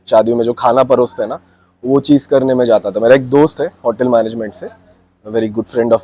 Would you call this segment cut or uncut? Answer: uncut